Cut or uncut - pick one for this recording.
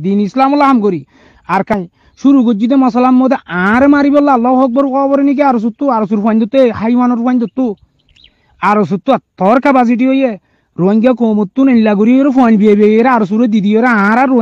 cut